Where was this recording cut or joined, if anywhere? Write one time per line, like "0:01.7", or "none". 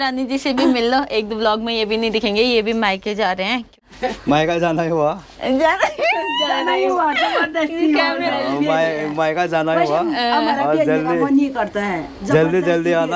0:03.8